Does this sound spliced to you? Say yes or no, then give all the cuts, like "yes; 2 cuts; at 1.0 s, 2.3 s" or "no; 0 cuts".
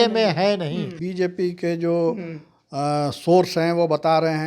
yes; 1 cut; at 1.0 s